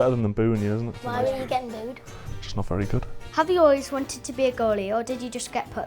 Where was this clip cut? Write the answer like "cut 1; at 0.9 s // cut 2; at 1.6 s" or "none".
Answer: cut 1; at 1.0 s // cut 2; at 3.1 s